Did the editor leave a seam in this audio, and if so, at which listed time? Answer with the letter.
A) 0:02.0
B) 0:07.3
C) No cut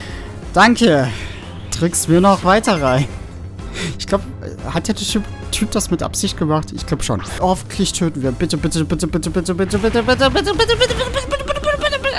B